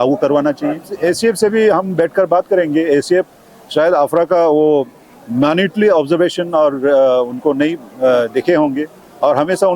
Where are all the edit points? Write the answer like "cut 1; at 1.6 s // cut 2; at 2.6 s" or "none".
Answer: cut 1; at 0.9 s